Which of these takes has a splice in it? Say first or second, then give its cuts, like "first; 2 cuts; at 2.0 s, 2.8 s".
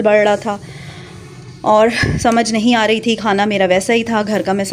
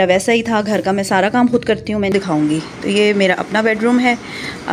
second; 1 cut; at 2.1 s